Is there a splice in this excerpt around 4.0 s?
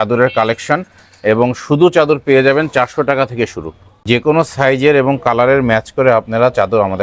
no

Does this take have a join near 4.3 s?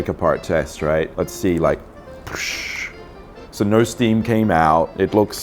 no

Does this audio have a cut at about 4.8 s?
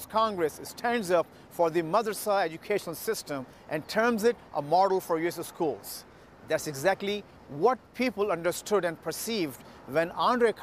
no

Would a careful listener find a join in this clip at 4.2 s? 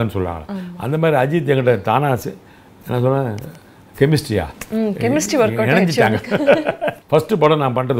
no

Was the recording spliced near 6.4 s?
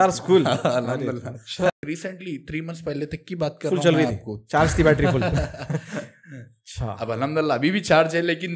no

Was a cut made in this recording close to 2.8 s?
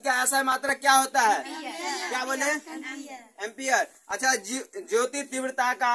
no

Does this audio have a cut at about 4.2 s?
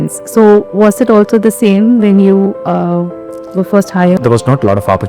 yes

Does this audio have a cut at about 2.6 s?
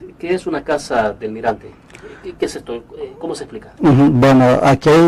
no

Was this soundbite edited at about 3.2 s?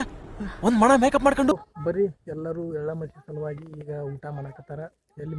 no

